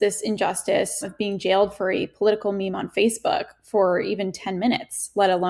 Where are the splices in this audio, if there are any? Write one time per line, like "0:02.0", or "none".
0:01.1